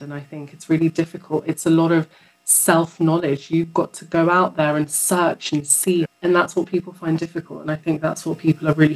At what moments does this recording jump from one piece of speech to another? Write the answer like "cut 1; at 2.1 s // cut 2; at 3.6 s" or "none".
cut 1; at 6.1 s